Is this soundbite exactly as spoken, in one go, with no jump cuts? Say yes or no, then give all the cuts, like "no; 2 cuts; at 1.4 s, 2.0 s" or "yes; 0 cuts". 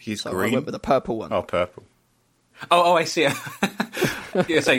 no; 1 cut; at 2.5 s